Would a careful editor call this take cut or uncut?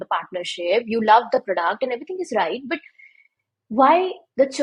uncut